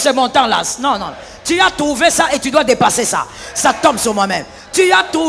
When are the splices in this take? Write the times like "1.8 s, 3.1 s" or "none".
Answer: none